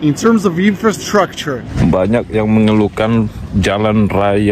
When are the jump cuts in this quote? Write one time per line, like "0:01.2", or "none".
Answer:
0:01.3

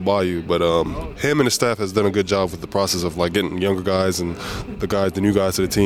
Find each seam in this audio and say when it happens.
0:01.0

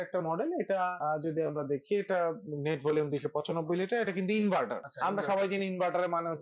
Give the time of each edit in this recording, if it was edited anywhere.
0:01.0
0:04.8

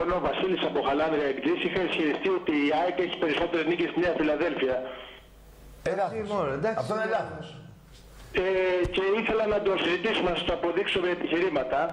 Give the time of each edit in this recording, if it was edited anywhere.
0:09.5

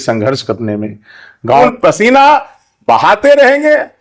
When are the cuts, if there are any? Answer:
0:01.6

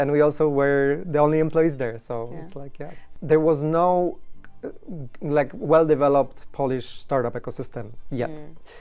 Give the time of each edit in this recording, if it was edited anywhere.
0:03.1

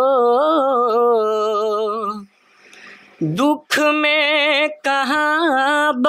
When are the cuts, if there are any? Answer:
none

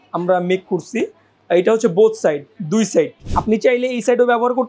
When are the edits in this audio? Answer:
0:03.2

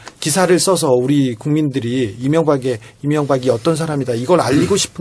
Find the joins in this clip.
0:03.8

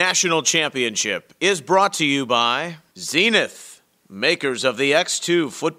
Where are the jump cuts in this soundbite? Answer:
0:02.7

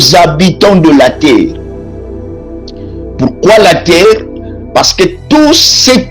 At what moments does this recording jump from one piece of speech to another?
0:01.6
0:02.9

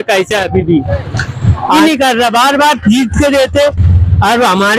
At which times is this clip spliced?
0:01.8

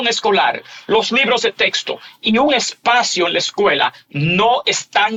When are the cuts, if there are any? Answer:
none

